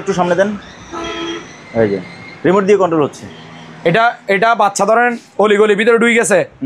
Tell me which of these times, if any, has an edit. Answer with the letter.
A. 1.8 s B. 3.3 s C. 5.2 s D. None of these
D